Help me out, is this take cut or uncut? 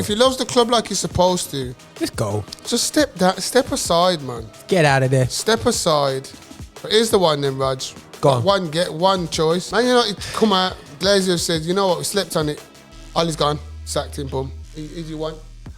cut